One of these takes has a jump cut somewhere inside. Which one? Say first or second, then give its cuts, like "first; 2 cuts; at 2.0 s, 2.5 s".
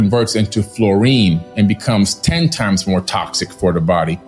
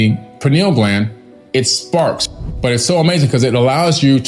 second; 1 cut; at 2.2 s